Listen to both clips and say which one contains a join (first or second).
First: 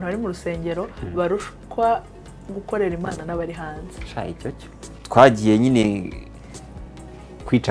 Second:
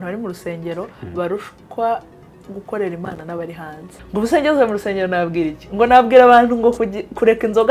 second